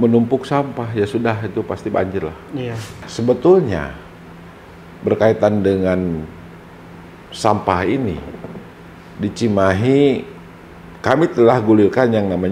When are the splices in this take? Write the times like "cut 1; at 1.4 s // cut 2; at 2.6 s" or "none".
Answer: cut 1; at 3.1 s